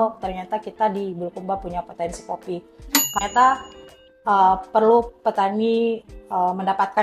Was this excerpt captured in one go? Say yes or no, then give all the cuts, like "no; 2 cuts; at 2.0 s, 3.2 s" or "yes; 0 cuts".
no; 1 cut; at 3.1 s